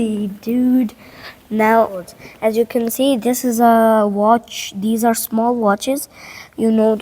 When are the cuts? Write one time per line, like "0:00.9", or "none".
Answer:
0:02.2